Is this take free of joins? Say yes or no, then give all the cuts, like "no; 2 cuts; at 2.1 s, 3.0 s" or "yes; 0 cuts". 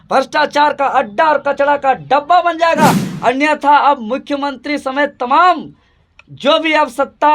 no; 1 cut; at 3.0 s